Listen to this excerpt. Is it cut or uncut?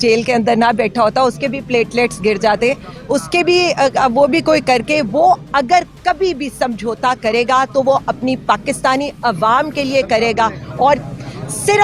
uncut